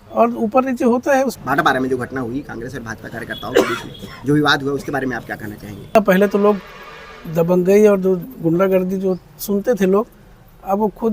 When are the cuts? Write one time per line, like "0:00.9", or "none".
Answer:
0:01.4
0:06.0